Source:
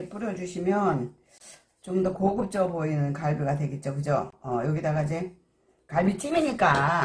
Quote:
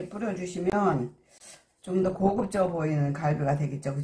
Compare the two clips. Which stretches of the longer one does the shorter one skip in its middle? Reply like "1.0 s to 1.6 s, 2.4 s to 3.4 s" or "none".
none